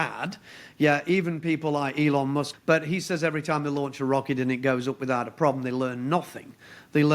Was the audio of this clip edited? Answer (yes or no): yes